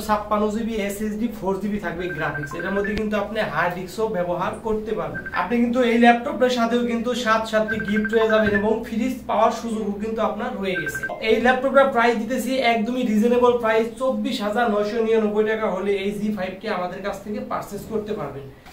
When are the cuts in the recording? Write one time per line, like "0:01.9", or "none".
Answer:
none